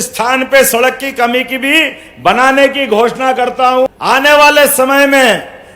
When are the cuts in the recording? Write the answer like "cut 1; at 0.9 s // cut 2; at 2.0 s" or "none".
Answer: cut 1; at 3.9 s

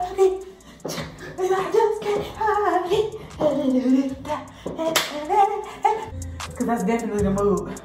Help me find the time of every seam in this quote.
cut 1; at 6.1 s

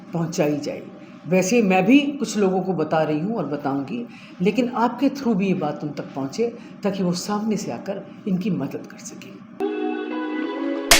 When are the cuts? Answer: cut 1; at 9.5 s

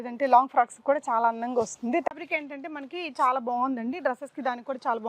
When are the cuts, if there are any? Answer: cut 1; at 2.1 s

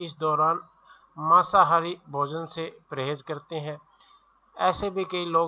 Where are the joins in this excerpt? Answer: cut 1; at 4.6 s

